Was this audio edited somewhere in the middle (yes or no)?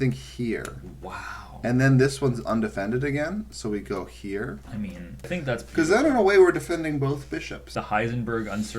yes